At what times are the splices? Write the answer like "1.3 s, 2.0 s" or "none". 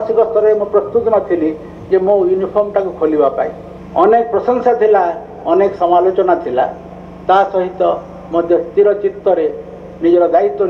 3.8 s